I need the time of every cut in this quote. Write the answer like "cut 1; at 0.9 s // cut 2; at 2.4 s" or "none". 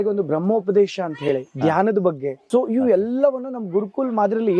cut 1; at 2.4 s